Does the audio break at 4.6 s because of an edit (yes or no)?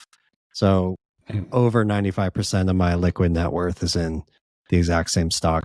no